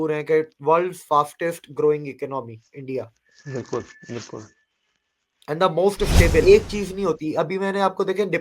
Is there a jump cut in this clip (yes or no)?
yes